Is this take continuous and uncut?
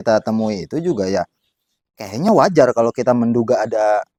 yes; 0 cuts

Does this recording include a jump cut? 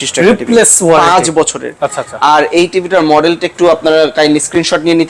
no; 0 cuts

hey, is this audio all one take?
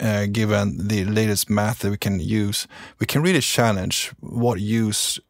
yes; 0 cuts

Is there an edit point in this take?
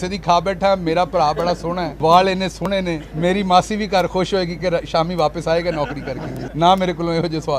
yes; 3 cuts; at 1.9 s, 3.0 s, 6.4 s

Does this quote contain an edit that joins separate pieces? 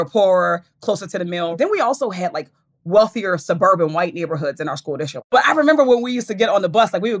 yes; 2 cuts; at 1.5 s, 5.3 s

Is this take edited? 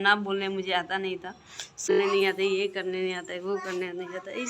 yes; 1 cut; at 1.9 s

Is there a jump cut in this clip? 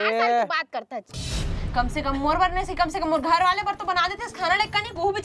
yes; 1 cut; at 1.2 s

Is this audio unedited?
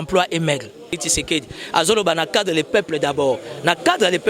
no; 1 cut; at 1.0 s

